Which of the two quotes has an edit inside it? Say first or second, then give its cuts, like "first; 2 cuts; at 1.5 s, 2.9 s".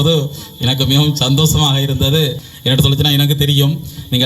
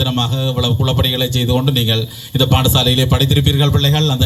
first; 1 cut; at 2.5 s